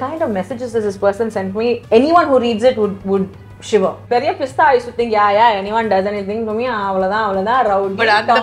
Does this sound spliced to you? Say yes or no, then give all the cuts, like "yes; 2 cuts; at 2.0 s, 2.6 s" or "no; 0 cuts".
yes; 2 cuts; at 1.8 s, 4.0 s